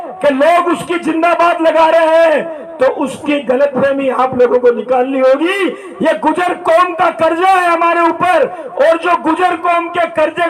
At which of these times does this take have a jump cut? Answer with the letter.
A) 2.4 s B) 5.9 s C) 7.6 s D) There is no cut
D